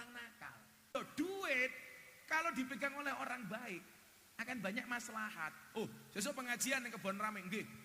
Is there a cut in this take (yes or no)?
yes